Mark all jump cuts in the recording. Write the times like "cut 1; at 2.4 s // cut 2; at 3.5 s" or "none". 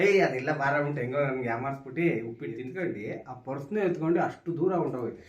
cut 1; at 2.6 s